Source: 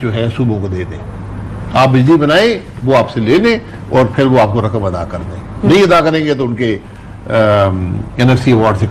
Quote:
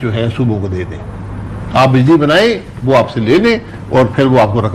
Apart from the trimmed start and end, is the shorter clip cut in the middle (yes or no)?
no